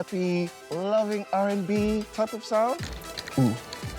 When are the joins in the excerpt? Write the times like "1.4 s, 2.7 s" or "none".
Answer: 2.8 s

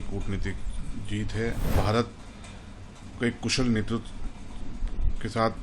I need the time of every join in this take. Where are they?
1.7 s

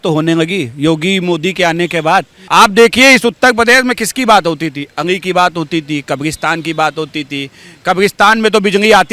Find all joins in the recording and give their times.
2.4 s

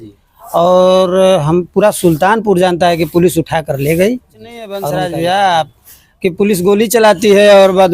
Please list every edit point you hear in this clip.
4.8 s

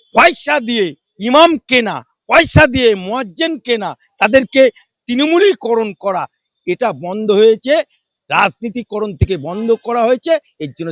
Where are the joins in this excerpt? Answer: none

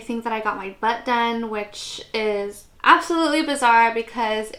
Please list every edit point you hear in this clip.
none

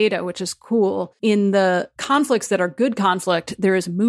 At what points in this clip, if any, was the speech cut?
1.1 s, 2.0 s

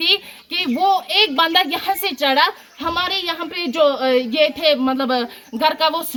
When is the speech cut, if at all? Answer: none

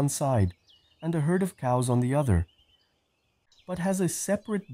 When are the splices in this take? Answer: 3.1 s

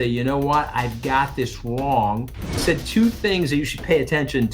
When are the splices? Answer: 2.6 s

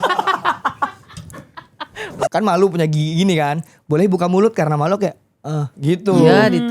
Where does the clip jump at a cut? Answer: 2.1 s

